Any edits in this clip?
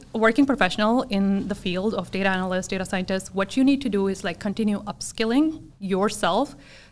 no; 0 cuts

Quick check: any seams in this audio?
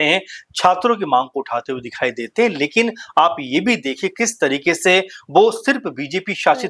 no; 0 cuts

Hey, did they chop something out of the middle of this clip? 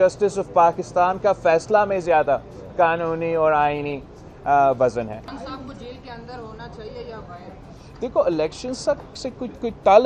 yes; 1 cut; at 5.2 s

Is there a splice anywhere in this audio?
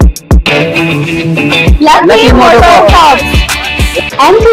no; 0 cuts

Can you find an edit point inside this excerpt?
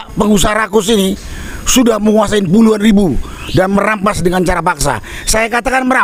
no; 0 cuts

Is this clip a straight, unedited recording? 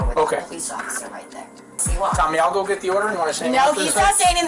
yes; 0 cuts

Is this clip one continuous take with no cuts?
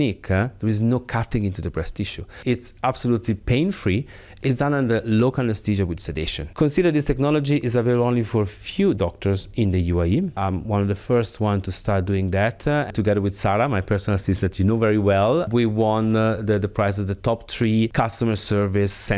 no; 6 cuts; at 2.3 s, 6.5 s, 10.4 s, 12.9 s, 15.5 s, 17.9 s

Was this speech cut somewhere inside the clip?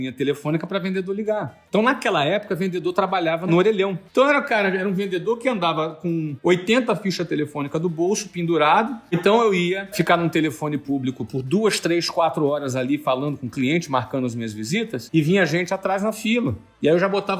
yes; 5 cuts; at 4.0 s, 6.3 s, 9.2 s, 9.9 s, 15.0 s

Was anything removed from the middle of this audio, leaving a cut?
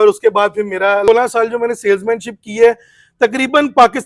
yes; 1 cut; at 1.1 s

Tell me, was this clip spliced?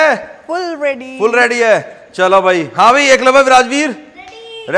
no; 0 cuts

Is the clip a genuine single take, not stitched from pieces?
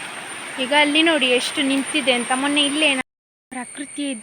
no; 1 cut; at 3.0 s

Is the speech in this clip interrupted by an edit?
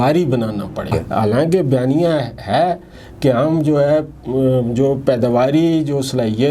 yes; 1 cut; at 0.9 s

